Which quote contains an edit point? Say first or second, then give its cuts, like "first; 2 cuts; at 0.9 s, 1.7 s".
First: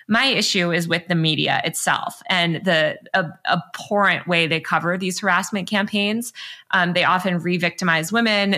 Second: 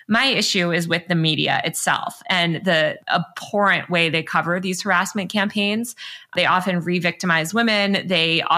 second; 2 cuts; at 3.0 s, 6.3 s